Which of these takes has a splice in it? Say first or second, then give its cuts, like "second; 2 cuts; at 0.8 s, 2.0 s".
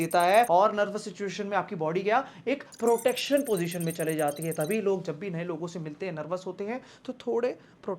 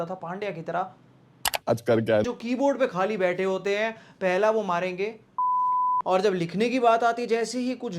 second; 1 cut; at 2.3 s